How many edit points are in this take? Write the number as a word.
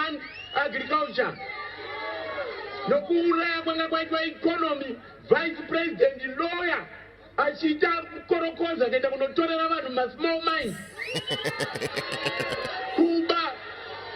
one